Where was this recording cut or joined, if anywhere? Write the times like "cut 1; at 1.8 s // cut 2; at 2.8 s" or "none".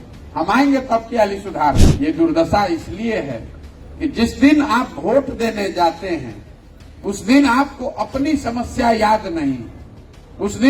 cut 1; at 1.9 s